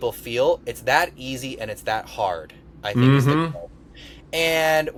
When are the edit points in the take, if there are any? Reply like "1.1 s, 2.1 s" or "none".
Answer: none